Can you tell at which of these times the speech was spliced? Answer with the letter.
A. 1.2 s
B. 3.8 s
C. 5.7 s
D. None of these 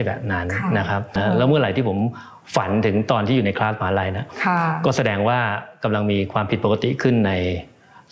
A